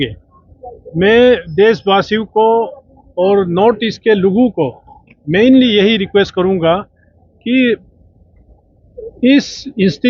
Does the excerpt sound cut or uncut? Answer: uncut